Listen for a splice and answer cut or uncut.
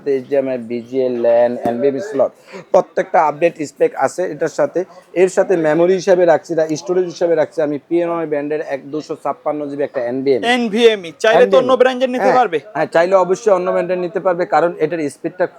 uncut